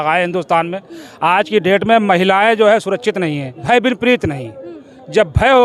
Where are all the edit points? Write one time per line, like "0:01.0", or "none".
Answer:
0:03.5